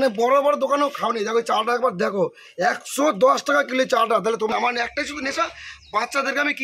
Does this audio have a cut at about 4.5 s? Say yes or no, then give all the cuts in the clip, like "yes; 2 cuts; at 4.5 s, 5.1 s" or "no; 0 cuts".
yes; 1 cut; at 4.5 s